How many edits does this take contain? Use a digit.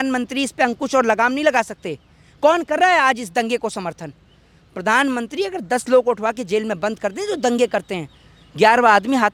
0